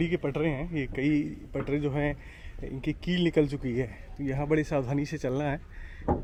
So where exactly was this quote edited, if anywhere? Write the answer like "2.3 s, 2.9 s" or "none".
none